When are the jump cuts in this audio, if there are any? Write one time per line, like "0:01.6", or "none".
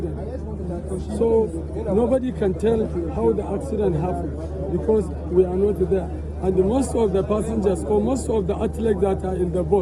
none